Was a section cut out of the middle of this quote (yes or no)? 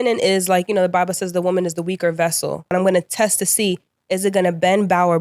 yes